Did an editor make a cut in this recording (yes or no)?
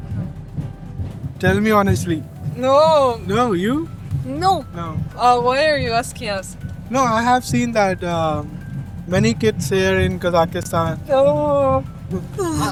no